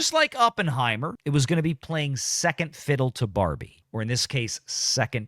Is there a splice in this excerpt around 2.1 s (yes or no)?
no